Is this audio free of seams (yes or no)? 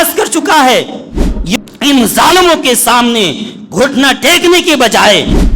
no